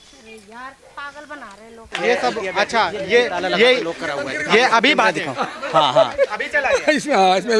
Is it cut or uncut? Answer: cut